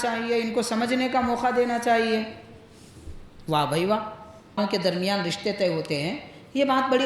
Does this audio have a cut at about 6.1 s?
no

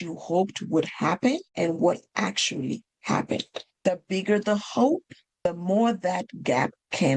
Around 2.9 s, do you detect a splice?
no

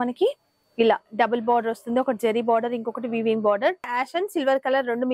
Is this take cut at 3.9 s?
yes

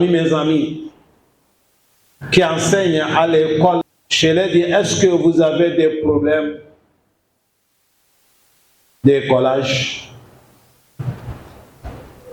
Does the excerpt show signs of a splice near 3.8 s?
yes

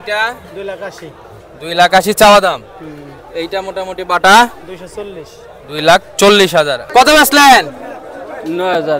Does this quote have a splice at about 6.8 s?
yes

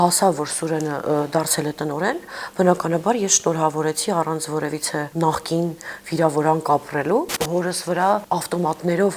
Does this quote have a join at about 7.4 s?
yes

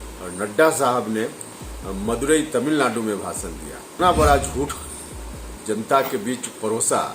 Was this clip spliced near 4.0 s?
yes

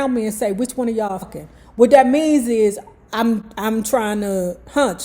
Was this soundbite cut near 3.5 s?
no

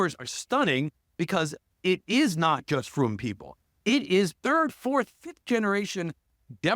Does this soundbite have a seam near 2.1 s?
no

